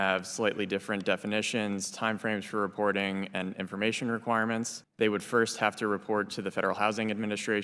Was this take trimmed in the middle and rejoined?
yes; 1 cut; at 4.8 s

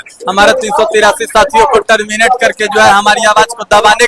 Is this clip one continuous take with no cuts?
yes; 0 cuts

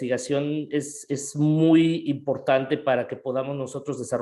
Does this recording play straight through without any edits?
yes; 0 cuts

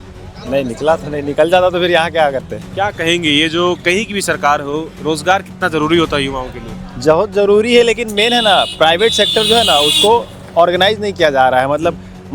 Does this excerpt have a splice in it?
yes; 1 cut; at 2.6 s

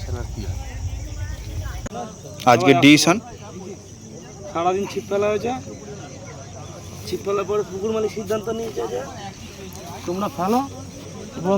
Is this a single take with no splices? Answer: no; 1 cut; at 1.8 s

